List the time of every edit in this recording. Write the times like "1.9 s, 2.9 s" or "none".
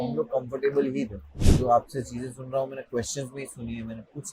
1.5 s